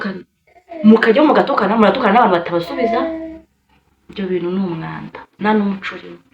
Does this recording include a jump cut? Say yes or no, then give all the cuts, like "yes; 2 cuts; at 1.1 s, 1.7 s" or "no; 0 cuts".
no; 0 cuts